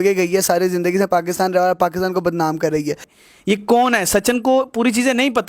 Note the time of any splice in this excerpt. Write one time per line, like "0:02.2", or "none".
0:03.1